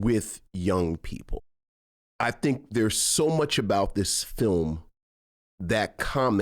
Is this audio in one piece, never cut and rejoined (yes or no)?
no